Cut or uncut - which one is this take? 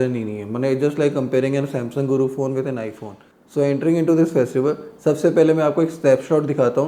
cut